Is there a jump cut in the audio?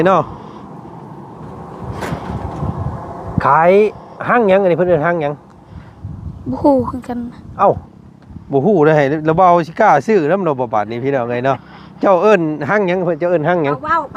no; 0 cuts

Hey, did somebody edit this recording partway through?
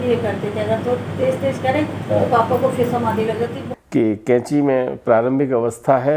yes; 1 cut; at 3.7 s

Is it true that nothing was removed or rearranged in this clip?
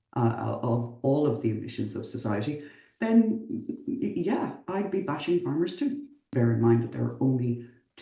no; 1 cut; at 6.3 s

